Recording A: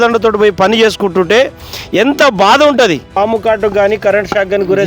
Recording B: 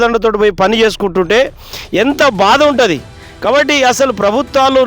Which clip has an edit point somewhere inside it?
A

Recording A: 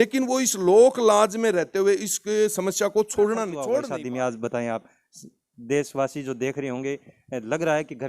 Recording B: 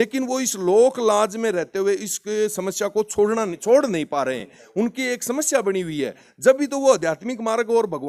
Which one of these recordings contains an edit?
A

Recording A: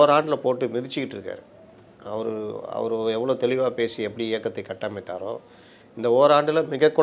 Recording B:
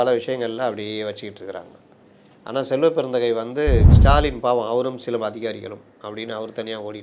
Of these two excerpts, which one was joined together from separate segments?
B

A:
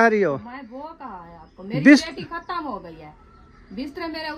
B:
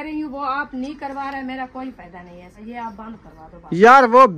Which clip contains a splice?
B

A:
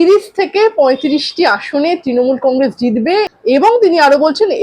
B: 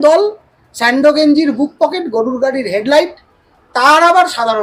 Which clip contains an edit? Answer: A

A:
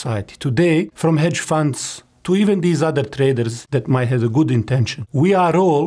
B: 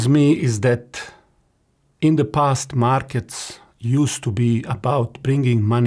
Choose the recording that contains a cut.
A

